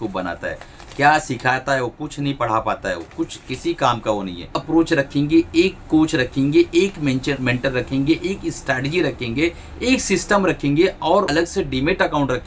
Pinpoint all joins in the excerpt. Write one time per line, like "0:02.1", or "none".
0:04.5
0:11.3